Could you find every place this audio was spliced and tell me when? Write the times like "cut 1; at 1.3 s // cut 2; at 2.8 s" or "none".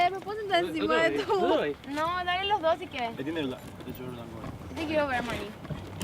none